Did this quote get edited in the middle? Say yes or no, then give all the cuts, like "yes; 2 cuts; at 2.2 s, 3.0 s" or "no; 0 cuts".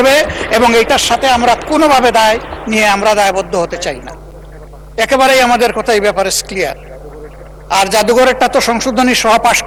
no; 0 cuts